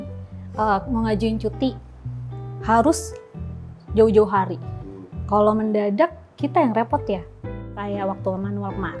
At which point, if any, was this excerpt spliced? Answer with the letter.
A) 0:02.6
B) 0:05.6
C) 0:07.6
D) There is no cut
C